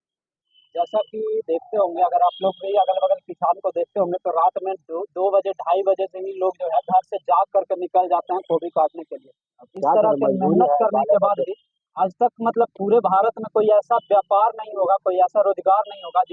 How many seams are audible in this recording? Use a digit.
0